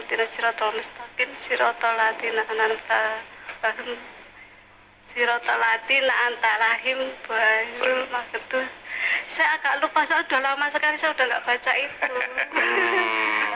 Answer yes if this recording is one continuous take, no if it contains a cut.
yes